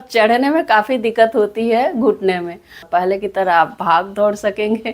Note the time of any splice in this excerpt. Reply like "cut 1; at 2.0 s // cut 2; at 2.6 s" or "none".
cut 1; at 2.8 s